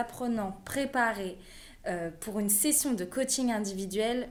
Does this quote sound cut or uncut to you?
uncut